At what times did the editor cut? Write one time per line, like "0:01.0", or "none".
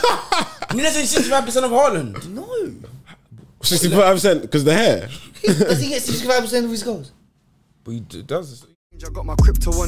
0:08.7